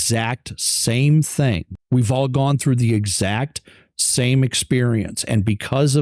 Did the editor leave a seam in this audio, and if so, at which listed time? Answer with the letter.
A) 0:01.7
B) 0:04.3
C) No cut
A